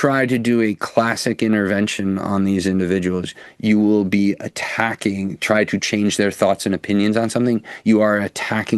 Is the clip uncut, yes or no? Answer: yes